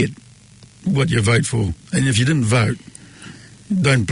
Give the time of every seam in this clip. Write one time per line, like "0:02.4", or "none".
none